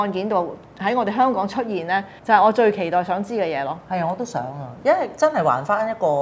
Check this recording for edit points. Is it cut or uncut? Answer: cut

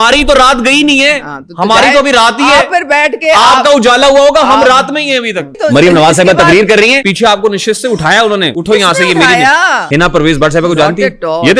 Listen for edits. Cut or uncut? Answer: cut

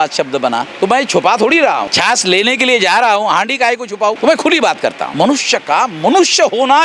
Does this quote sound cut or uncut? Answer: cut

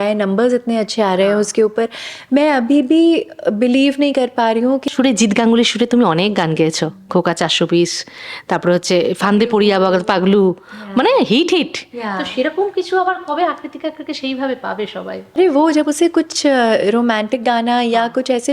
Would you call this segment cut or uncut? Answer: cut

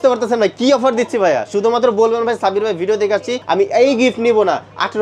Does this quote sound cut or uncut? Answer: cut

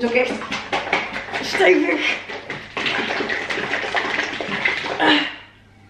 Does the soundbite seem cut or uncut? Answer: uncut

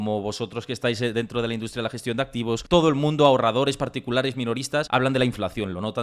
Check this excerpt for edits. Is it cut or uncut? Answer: cut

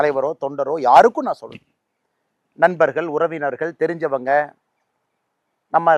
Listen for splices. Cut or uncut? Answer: uncut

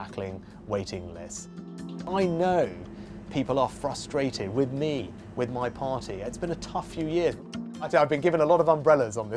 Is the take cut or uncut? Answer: cut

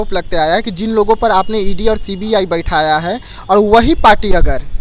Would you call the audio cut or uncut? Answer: uncut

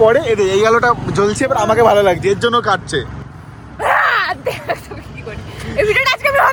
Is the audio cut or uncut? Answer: uncut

